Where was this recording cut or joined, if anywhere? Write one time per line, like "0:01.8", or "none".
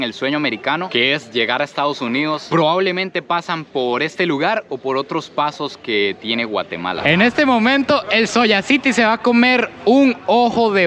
0:07.0